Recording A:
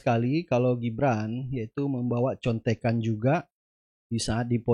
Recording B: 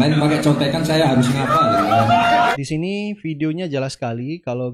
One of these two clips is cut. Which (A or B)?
B